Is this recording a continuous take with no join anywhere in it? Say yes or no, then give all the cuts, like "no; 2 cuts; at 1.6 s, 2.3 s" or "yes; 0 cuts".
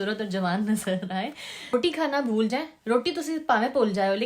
no; 1 cut; at 1.7 s